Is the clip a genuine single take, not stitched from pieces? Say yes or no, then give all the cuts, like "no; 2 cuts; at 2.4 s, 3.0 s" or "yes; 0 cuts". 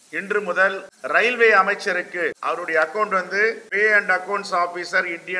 no; 3 cuts; at 0.9 s, 2.4 s, 3.6 s